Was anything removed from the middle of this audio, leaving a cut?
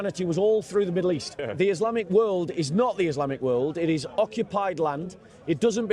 yes; 1 cut; at 1.6 s

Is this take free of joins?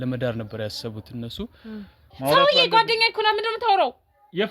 no; 1 cut; at 2.0 s

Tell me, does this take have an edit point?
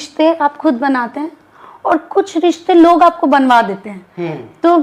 no; 0 cuts

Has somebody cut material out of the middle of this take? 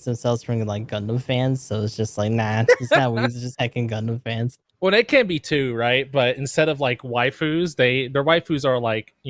no; 0 cuts

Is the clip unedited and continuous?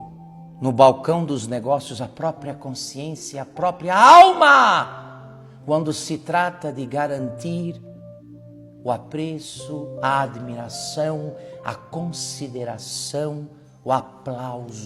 yes; 0 cuts

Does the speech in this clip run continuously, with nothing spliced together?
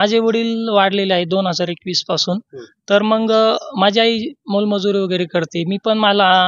yes; 0 cuts

